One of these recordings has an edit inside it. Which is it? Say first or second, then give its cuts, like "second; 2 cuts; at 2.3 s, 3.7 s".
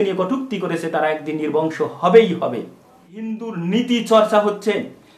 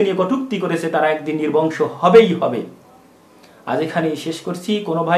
first; 1 cut; at 3.4 s